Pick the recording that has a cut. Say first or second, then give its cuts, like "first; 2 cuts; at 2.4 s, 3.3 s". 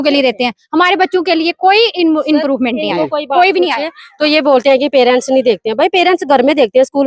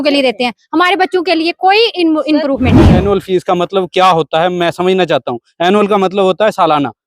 second; 1 cut; at 3.0 s